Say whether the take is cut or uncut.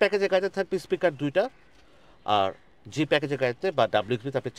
uncut